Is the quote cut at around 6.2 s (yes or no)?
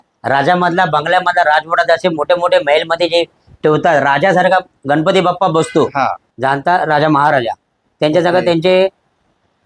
yes